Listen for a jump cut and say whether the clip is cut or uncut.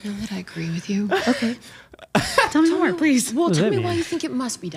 uncut